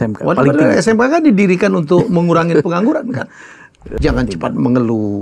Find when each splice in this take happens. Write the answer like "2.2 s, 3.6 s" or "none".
3.8 s